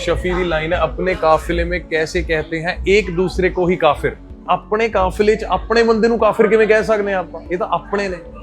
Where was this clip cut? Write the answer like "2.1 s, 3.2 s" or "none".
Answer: none